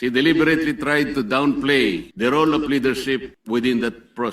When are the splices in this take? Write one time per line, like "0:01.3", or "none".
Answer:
0:02.1
0:03.3